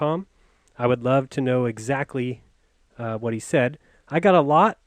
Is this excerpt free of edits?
no; 1 cut; at 1.3 s

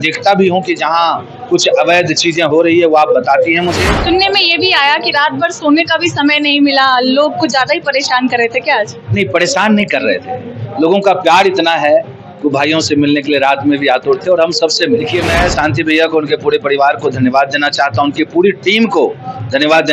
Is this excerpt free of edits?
no; 2 cuts; at 3.9 s, 15.1 s

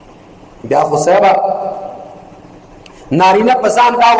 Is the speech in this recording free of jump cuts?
yes; 0 cuts

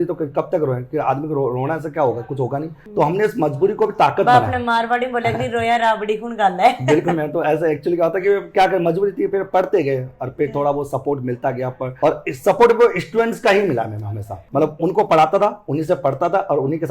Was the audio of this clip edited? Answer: no; 0 cuts

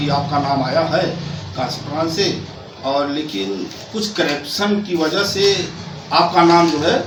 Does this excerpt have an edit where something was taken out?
no; 0 cuts

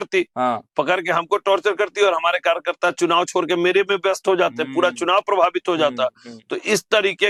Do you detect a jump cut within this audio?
no; 0 cuts

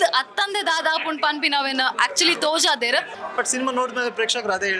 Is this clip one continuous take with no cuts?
no; 1 cut; at 3.2 s

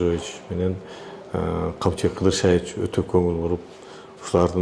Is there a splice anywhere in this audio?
no; 0 cuts

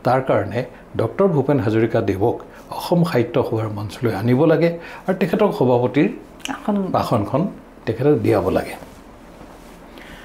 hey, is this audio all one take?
yes; 0 cuts

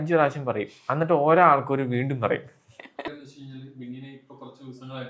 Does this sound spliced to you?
yes; 1 cut; at 3.1 s

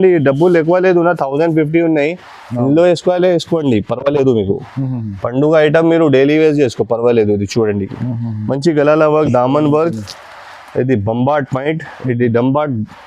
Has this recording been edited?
no; 0 cuts

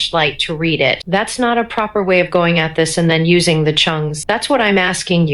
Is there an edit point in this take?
yes; 2 cuts; at 1.0 s, 4.1 s

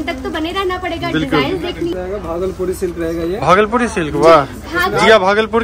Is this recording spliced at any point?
yes; 1 cut; at 1.9 s

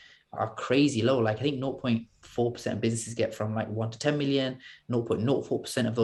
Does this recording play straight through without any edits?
yes; 0 cuts

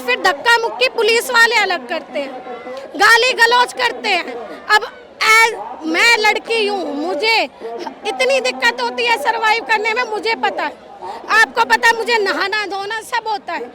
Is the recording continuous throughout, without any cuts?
yes; 0 cuts

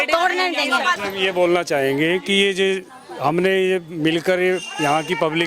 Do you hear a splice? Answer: no; 0 cuts

